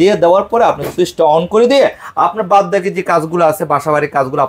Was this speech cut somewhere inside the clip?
no; 0 cuts

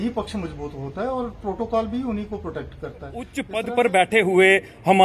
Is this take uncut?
no; 1 cut; at 3.4 s

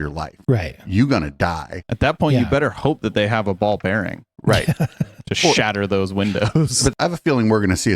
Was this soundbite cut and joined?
yes; 2 cuts; at 1.8 s, 6.9 s

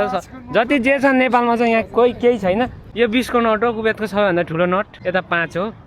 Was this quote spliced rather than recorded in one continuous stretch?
yes; 2 cuts; at 2.8 s, 4.9 s

